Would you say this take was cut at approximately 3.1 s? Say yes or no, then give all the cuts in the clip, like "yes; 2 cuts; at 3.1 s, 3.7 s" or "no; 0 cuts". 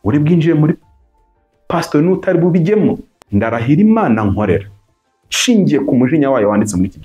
yes; 1 cut; at 3.1 s